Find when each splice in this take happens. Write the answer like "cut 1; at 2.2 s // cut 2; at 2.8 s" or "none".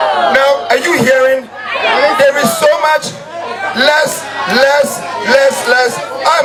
none